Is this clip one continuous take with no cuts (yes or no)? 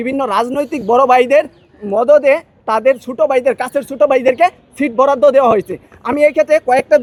yes